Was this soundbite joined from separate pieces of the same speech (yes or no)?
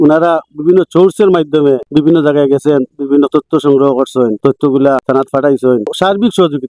no